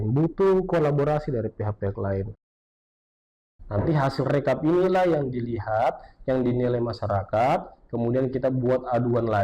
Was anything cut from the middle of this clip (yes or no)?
yes